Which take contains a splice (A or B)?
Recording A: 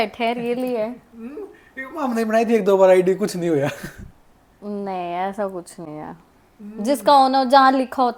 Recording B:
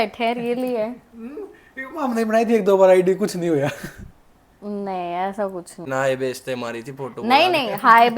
B